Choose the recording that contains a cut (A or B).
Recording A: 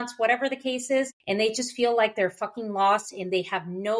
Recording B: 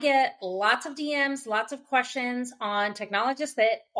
A